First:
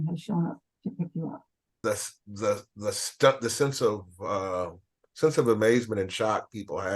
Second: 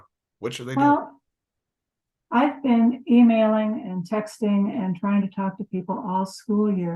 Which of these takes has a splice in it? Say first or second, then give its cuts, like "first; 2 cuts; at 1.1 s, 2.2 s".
first; 1 cut; at 1.8 s